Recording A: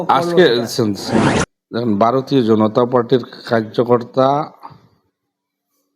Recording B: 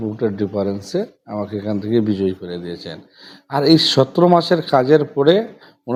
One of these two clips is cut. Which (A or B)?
A